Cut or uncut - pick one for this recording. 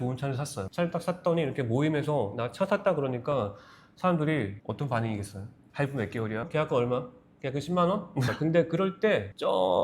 cut